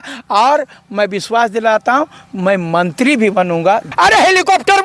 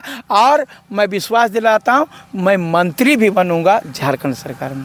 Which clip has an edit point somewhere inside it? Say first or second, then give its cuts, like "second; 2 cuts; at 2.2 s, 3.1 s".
first; 1 cut; at 3.9 s